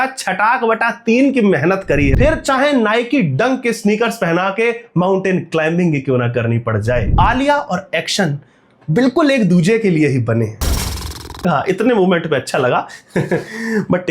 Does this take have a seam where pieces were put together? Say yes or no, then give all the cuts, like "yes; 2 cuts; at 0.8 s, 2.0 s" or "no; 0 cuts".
yes; 3 cuts; at 2.1 s, 7.1 s, 10.6 s